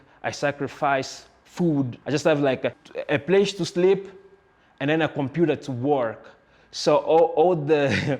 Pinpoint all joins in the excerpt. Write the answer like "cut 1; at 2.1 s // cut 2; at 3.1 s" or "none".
cut 1; at 2.0 s // cut 2; at 2.8 s